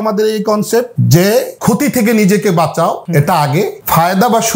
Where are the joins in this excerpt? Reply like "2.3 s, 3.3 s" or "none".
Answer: 1.0 s, 1.5 s, 3.3 s